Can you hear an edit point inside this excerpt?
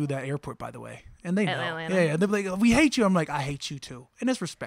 no; 0 cuts

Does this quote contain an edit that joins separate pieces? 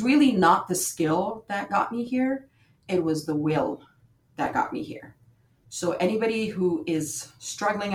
no; 0 cuts

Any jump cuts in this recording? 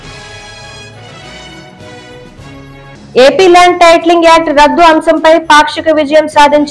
no; 0 cuts

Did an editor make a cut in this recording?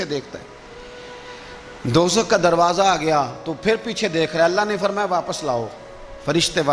no; 0 cuts

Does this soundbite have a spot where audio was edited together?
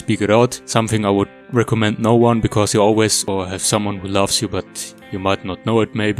yes; 1 cut; at 3.2 s

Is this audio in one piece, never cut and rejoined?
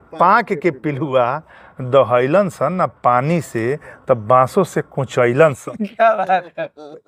yes; 0 cuts

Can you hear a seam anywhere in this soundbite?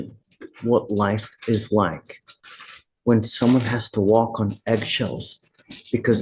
no; 0 cuts

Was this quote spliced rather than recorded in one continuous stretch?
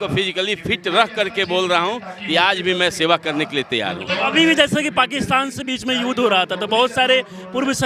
no; 0 cuts

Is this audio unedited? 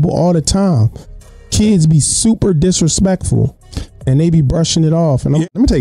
yes; 0 cuts

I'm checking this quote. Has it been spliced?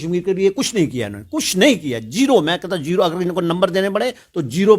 no; 0 cuts

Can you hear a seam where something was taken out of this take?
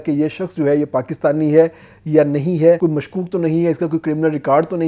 yes; 1 cut; at 2.8 s

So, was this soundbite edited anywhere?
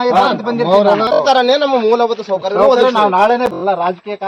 yes; 2 cuts; at 1.2 s, 3.5 s

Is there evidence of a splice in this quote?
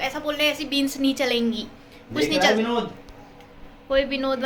no; 0 cuts

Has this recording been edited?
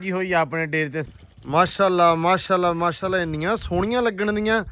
yes; 1 cut; at 1.0 s

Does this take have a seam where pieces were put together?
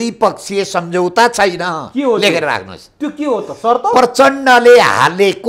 no; 0 cuts

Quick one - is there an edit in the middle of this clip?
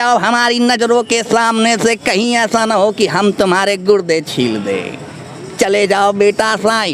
no; 0 cuts

